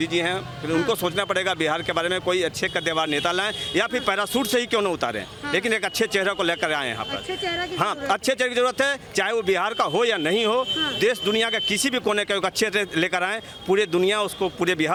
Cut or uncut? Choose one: uncut